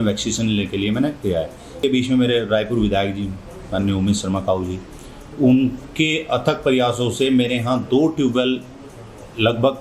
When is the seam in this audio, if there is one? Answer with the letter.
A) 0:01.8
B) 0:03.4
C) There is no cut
A